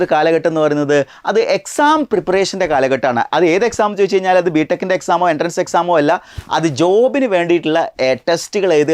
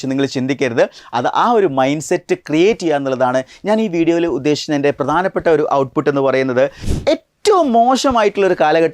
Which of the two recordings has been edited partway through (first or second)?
second